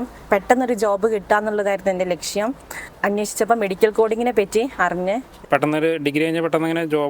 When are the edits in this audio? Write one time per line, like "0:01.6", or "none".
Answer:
0:02.9
0:05.3